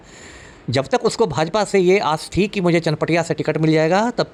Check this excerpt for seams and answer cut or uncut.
uncut